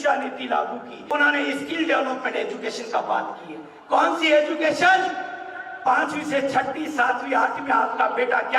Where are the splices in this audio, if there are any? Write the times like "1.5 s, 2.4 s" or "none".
0.9 s

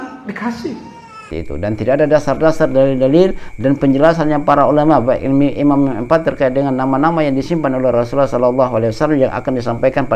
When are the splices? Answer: 1.3 s

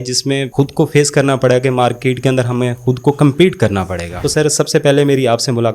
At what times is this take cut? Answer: 4.1 s

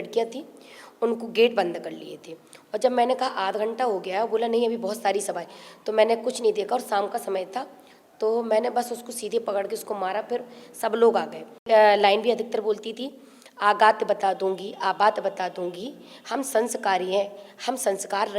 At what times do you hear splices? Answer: 11.6 s

